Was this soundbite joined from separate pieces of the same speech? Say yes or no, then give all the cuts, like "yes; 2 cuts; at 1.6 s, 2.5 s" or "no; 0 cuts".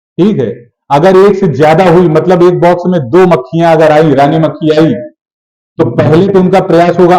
no; 0 cuts